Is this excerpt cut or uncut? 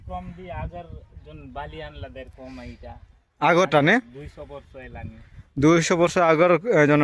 uncut